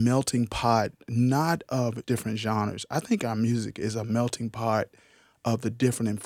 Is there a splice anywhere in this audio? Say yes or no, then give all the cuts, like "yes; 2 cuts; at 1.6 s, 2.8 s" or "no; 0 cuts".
yes; 1 cut; at 2.0 s